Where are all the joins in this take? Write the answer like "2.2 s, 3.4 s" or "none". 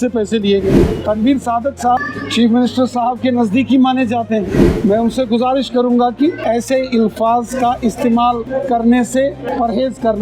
0.8 s, 2.0 s, 4.7 s, 6.4 s, 8.4 s, 9.4 s